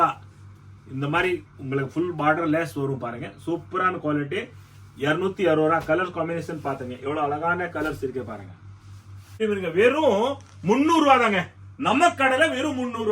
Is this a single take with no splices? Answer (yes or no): no